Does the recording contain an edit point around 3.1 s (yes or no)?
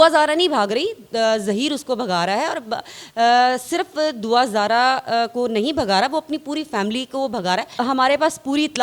no